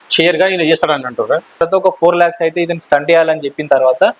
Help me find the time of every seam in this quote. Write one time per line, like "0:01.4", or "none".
0:01.6